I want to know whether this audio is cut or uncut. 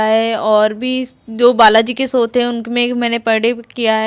uncut